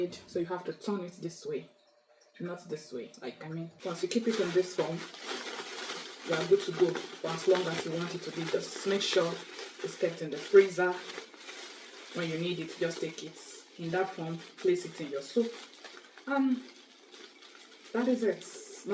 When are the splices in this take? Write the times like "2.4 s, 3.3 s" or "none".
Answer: 3.7 s